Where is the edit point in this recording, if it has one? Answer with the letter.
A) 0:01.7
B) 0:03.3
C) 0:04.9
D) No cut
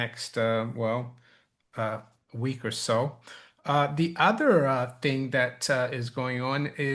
D